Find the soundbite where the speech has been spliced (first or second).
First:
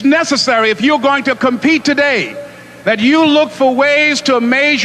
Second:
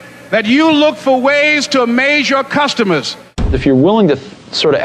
second